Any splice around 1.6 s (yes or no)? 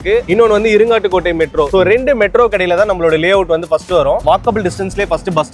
no